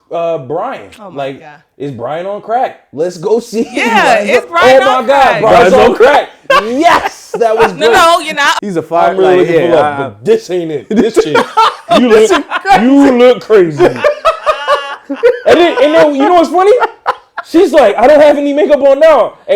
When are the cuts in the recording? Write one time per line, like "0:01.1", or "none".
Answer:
0:08.5